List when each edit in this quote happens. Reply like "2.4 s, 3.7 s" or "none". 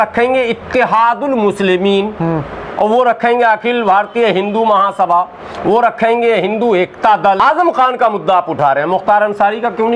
7.4 s